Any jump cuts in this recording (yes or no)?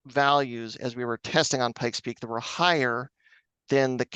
no